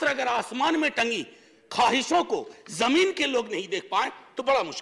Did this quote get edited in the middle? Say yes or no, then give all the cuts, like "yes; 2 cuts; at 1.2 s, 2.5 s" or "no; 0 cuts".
no; 0 cuts